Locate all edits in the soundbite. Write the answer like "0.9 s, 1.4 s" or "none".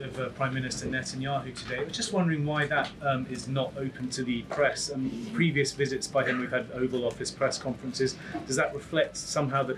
none